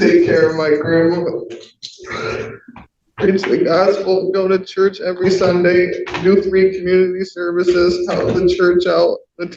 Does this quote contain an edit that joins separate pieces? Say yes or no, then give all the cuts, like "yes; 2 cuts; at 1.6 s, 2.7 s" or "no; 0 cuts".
yes; 1 cut; at 3.0 s